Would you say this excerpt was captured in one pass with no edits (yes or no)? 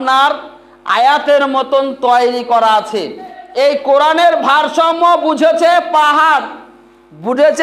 no